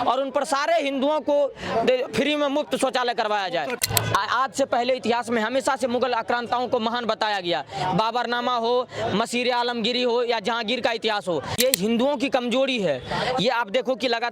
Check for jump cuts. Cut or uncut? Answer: cut